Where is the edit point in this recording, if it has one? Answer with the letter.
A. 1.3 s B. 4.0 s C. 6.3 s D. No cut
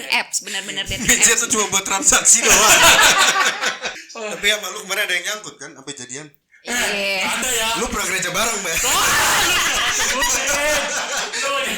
B